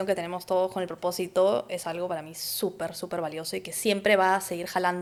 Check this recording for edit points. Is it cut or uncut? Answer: uncut